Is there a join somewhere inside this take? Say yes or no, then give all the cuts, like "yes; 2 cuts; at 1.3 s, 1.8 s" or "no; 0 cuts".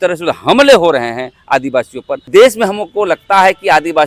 yes; 1 cut; at 2.2 s